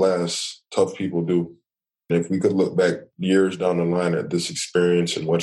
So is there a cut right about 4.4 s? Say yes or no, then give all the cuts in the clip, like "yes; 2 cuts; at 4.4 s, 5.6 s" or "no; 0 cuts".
no; 2 cuts; at 2.1 s, 3.1 s